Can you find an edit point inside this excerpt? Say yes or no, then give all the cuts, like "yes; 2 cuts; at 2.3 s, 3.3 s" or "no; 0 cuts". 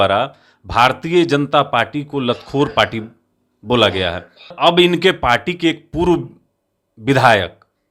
yes; 1 cut; at 4.5 s